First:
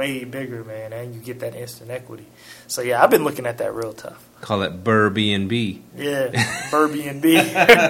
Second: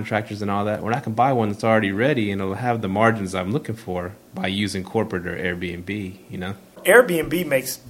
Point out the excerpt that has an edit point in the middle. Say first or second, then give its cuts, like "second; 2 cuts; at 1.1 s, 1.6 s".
second; 1 cut; at 6.8 s